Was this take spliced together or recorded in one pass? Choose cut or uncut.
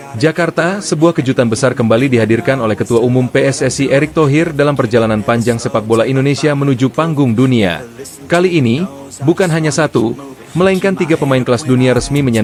uncut